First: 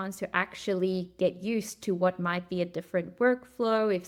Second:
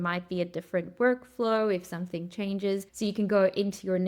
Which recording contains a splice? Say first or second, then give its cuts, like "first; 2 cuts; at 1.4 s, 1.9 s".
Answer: second; 1 cut; at 2.9 s